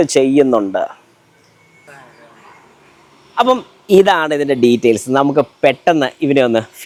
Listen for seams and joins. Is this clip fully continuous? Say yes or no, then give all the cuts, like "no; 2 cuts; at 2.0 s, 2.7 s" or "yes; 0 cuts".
yes; 0 cuts